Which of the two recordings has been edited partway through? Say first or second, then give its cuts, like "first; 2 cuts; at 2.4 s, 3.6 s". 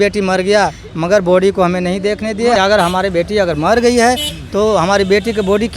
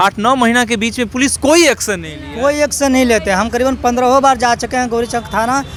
first; 1 cut; at 2.6 s